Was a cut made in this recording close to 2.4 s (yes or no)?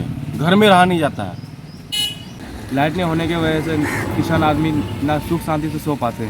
yes